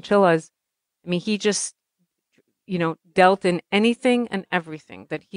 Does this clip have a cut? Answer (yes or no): no